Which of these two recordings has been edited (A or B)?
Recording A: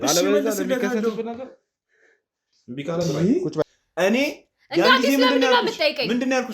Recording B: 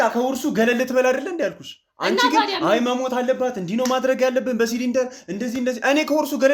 A